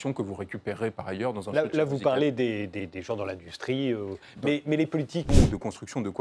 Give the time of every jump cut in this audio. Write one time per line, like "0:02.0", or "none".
0:05.3

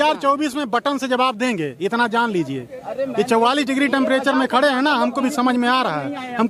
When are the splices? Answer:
none

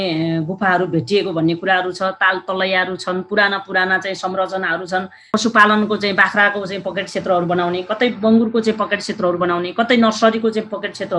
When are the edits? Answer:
0:05.3

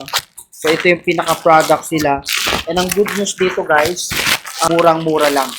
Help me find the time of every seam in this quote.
0:04.7

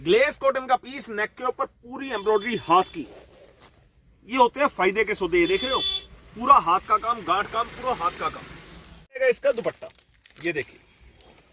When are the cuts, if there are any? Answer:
0:09.2

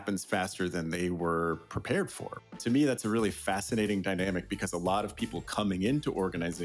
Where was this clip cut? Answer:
0:02.5

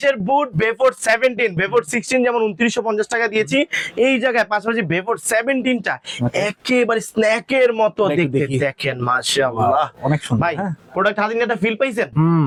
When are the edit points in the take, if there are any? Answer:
none

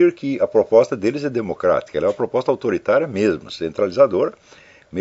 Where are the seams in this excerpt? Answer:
none

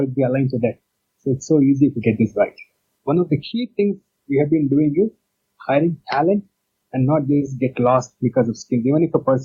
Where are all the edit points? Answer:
0:02.9

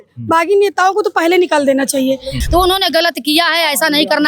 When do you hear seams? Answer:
0:02.3

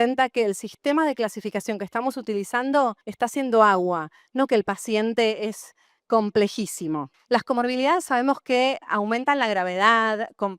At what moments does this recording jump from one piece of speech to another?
0:03.0
0:07.1

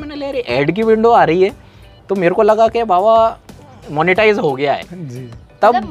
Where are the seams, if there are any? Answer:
none

